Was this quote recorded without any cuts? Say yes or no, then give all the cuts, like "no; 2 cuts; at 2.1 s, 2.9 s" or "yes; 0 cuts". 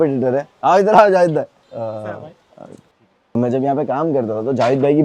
no; 2 cuts; at 1.6 s, 3.3 s